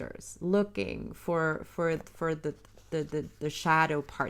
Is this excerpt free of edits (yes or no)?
yes